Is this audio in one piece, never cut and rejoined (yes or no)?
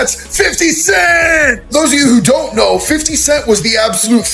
yes